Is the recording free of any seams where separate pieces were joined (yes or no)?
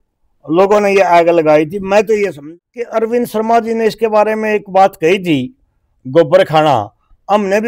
no